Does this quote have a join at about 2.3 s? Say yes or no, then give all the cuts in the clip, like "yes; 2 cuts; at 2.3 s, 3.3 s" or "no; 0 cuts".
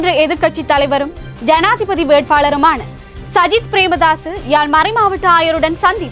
no; 0 cuts